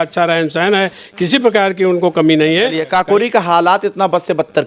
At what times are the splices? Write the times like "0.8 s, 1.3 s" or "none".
2.8 s